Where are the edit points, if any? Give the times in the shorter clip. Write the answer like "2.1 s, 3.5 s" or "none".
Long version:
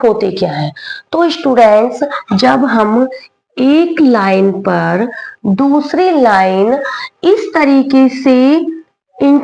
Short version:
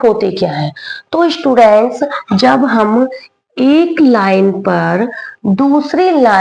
none